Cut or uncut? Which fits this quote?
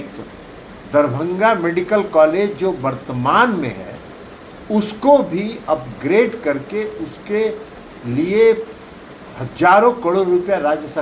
uncut